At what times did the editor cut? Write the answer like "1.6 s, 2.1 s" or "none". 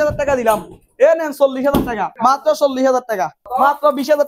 2.0 s, 3.4 s